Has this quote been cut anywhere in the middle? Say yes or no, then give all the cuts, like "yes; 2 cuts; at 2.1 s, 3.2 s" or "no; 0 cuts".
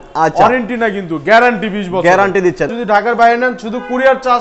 yes; 1 cut; at 2.7 s